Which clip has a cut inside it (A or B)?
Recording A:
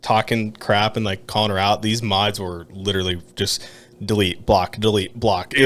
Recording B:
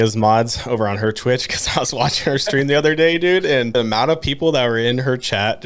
B